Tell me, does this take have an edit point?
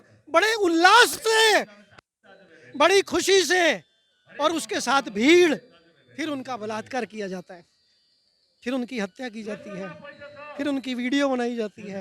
no; 0 cuts

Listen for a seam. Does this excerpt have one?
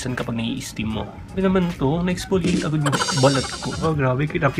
yes; 2 cuts; at 1.4 s, 3.7 s

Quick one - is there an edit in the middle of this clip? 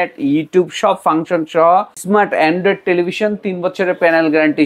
yes; 1 cut; at 1.9 s

